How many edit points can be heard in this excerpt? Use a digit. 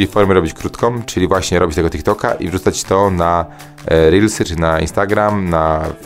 1